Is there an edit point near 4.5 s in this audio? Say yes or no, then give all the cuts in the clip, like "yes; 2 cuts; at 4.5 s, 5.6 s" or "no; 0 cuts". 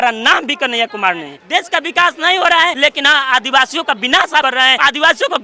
yes; 3 cuts; at 1.4 s, 2.8 s, 4.5 s